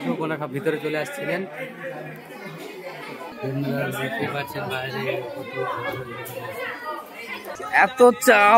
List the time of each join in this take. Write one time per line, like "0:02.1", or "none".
0:03.3
0:07.6